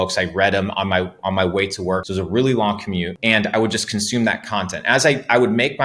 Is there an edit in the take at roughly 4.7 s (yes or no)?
no